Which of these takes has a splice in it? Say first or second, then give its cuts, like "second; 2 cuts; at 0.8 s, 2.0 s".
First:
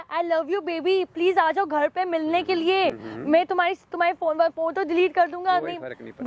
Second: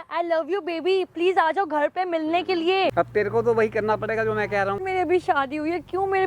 second; 2 cuts; at 2.9 s, 4.8 s